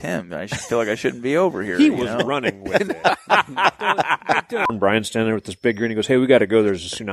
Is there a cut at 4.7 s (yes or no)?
yes